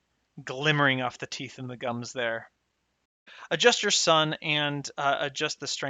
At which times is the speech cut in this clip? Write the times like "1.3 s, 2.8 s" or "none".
3.3 s